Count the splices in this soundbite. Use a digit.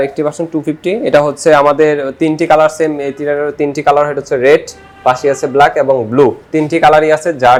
0